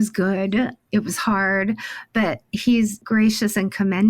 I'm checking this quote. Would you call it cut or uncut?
cut